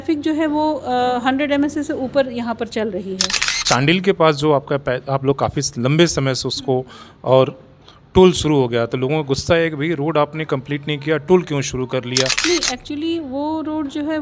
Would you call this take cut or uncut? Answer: cut